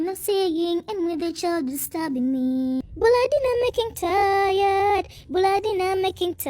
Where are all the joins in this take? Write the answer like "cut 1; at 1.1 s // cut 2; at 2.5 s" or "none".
cut 1; at 2.8 s